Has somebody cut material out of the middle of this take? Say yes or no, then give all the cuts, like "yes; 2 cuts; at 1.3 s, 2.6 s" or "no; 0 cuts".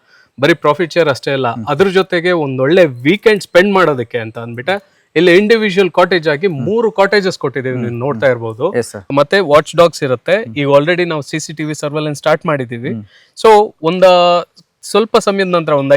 yes; 1 cut; at 9.0 s